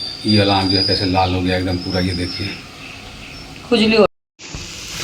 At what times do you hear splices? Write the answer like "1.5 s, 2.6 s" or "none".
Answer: 4.1 s